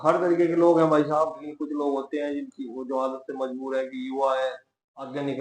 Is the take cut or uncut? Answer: cut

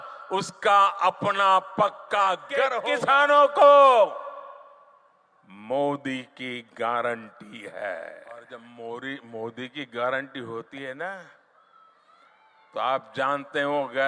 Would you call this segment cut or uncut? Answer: cut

